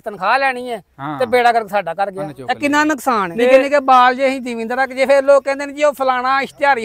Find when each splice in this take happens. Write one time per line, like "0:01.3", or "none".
0:02.3
0:03.3